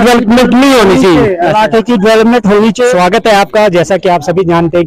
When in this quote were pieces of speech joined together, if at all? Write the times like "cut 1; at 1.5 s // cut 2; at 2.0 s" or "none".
none